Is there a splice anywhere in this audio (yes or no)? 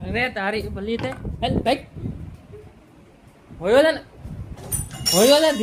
no